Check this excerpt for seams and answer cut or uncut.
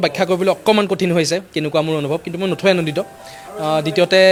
uncut